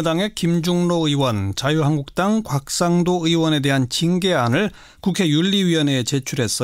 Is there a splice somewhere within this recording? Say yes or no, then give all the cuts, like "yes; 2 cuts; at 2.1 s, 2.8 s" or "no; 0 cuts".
no; 0 cuts